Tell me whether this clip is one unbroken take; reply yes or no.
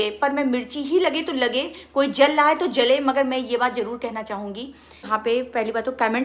no